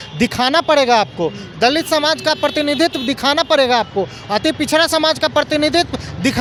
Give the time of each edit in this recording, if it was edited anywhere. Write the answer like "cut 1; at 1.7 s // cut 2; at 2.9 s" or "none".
none